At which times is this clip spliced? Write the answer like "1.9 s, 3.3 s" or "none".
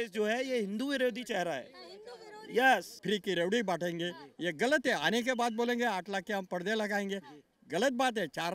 2.9 s